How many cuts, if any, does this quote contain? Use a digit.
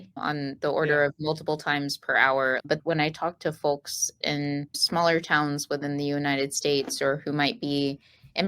2